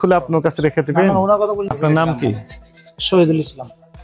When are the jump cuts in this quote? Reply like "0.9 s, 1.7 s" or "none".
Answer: 1.7 s